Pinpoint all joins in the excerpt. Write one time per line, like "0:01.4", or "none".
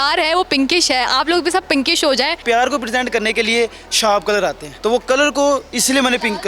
0:02.4
0:04.7